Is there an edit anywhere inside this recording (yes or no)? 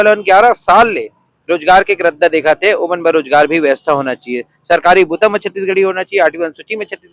no